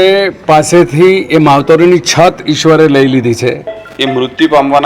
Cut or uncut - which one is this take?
cut